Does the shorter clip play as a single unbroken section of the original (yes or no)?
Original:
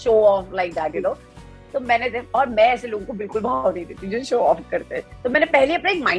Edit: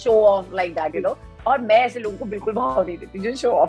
no